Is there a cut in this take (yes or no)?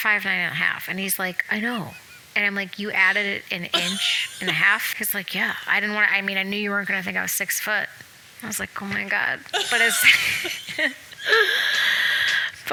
no